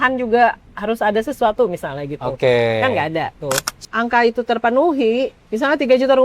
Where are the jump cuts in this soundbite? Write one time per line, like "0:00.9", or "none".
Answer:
0:03.7